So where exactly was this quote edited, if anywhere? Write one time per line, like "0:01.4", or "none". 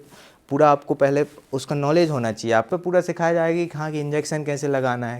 0:02.7